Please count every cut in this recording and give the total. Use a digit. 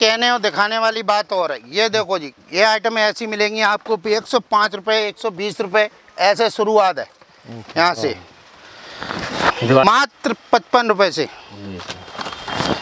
1